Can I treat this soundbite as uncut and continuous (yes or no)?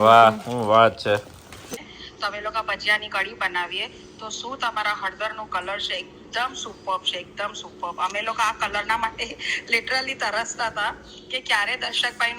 no